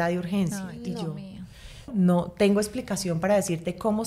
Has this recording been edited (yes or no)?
yes